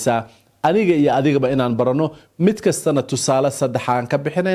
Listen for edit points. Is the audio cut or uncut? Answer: uncut